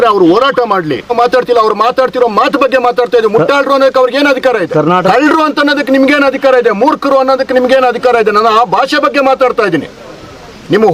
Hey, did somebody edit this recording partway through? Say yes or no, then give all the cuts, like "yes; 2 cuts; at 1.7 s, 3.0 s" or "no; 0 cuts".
yes; 2 cuts; at 1.1 s, 5.1 s